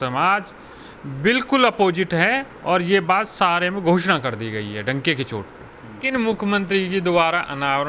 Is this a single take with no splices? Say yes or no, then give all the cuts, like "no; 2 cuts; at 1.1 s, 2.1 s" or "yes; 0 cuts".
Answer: no; 1 cut; at 6.0 s